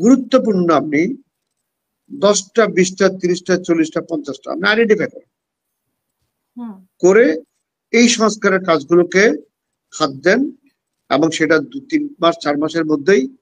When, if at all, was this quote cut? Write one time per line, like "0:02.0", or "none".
none